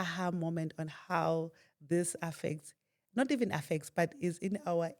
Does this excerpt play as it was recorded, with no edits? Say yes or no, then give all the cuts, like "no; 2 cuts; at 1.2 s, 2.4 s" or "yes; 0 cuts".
yes; 0 cuts